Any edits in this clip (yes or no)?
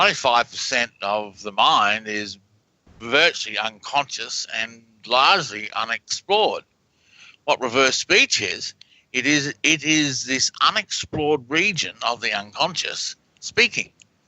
yes